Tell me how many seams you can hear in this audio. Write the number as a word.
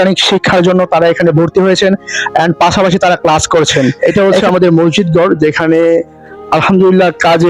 one